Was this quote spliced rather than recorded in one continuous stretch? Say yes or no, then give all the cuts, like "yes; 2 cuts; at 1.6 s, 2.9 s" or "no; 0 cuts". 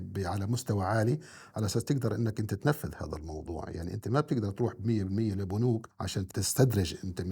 yes; 1 cut; at 6.2 s